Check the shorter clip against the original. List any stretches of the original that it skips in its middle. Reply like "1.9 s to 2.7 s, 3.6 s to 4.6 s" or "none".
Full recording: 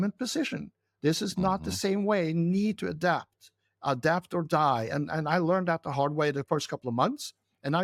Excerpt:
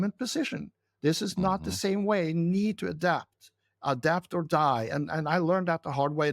none